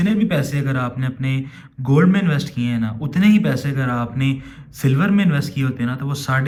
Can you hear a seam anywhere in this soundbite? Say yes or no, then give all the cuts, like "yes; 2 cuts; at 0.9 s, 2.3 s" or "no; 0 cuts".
no; 0 cuts